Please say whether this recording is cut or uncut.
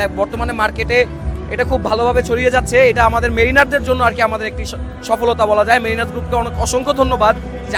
uncut